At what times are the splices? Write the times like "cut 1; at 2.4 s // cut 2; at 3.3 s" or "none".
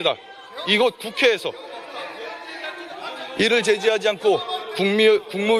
none